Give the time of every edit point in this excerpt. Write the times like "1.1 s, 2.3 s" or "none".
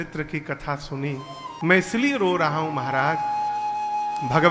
1.6 s